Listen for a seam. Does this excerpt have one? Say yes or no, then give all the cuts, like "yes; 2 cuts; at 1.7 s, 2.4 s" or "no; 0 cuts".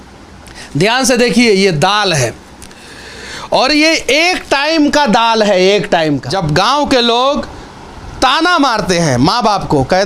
yes; 1 cut; at 6.3 s